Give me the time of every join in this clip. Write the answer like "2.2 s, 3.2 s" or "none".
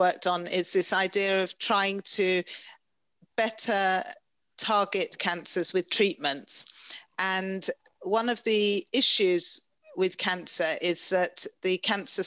none